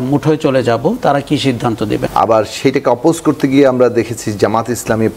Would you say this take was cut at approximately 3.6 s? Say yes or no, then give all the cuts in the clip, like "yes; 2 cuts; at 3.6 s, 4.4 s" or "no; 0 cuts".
no; 1 cut; at 2.1 s